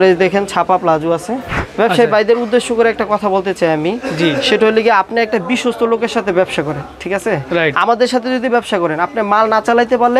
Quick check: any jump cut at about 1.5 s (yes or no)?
yes